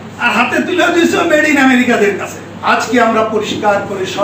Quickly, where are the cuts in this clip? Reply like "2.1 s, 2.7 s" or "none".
2.5 s